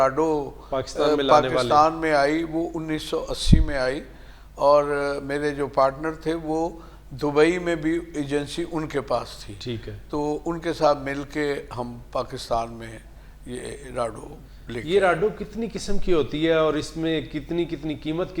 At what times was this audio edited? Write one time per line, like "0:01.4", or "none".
none

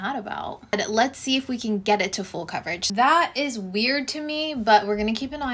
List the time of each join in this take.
0:00.7
0:02.9

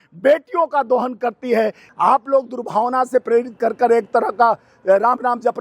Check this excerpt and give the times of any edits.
0:01.8

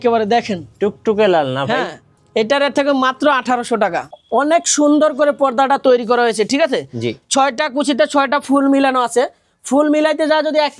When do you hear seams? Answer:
0:04.1

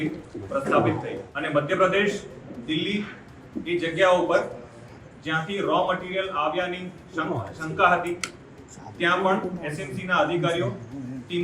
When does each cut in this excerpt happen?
0:01.3

